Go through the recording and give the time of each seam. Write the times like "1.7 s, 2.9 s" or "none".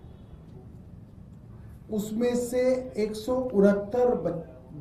none